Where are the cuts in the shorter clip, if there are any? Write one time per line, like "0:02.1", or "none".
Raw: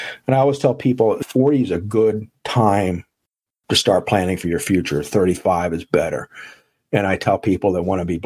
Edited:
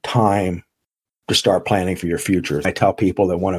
0:02.7